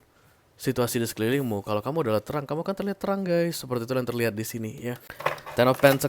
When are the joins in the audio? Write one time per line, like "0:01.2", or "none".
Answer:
0:05.1